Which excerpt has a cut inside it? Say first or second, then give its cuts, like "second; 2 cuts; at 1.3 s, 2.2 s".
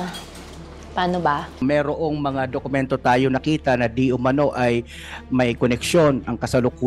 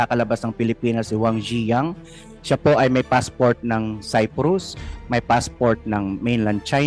first; 1 cut; at 1.5 s